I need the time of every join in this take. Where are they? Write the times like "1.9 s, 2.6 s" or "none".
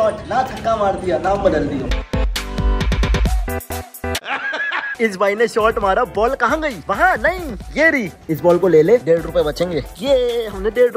none